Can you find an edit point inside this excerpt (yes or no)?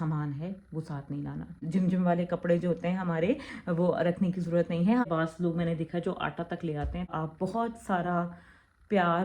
yes